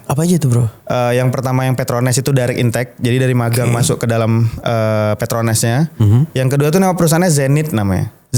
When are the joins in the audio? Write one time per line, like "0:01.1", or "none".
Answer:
none